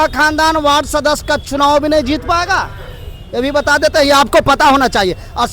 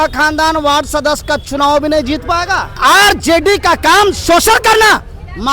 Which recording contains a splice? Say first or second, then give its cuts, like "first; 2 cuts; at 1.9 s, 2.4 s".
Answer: second; 1 cut; at 2.8 s